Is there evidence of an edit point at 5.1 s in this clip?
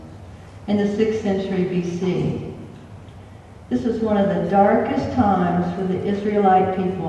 yes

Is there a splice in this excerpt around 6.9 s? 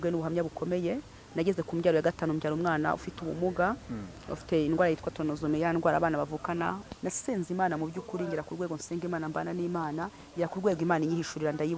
yes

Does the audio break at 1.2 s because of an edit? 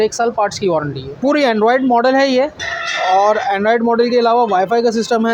yes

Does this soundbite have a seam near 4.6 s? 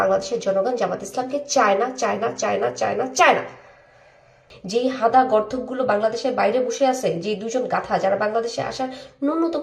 yes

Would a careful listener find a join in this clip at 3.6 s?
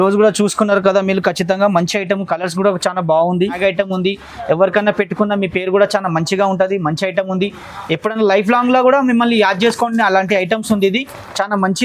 yes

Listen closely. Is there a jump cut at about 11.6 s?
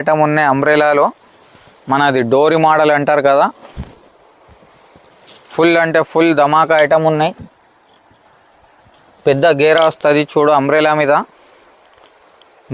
no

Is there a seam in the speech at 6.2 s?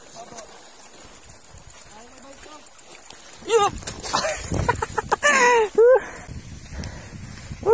yes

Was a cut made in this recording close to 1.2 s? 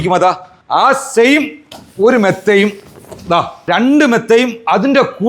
no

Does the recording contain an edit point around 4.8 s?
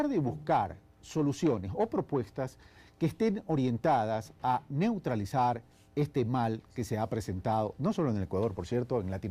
no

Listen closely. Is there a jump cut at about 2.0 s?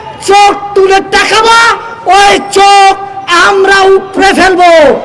no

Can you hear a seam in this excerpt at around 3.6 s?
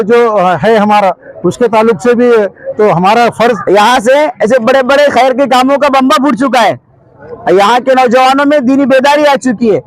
yes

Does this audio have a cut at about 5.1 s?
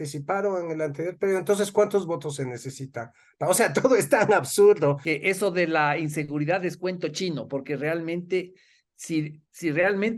yes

